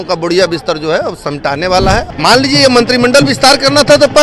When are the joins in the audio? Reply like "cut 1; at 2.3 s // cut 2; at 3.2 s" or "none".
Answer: cut 1; at 2.1 s